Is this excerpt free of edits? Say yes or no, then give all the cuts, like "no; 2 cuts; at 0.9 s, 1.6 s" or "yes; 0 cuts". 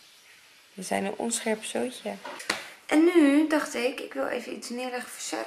no; 1 cut; at 2.3 s